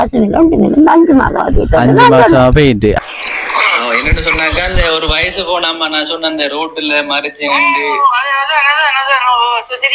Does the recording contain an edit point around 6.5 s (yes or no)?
no